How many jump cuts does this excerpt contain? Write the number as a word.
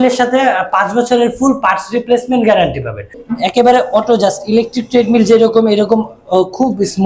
one